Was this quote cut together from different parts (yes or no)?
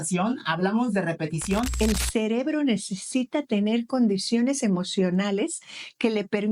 yes